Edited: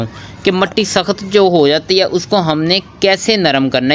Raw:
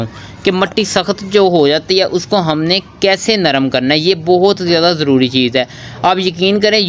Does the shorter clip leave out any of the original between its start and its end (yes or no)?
no